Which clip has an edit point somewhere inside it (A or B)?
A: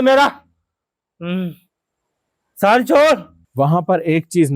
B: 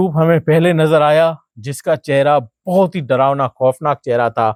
A